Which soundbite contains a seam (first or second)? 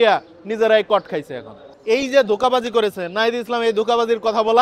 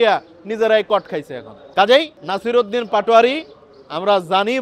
first